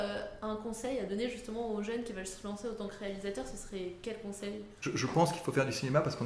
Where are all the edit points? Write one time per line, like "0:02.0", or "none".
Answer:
0:04.7